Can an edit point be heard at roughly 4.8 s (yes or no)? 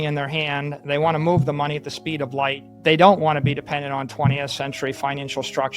no